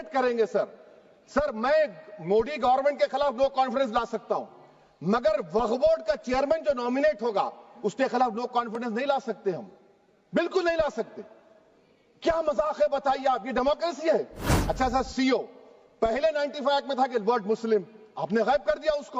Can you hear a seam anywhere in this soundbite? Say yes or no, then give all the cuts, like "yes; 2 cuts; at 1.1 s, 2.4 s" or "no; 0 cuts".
yes; 1 cut; at 14.6 s